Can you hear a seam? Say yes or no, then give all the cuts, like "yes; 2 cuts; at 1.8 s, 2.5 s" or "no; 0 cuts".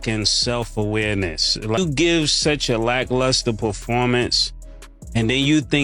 yes; 1 cut; at 1.8 s